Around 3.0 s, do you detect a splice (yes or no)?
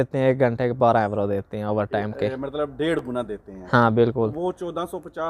no